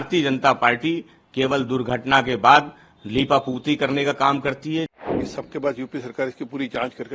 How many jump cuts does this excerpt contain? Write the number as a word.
one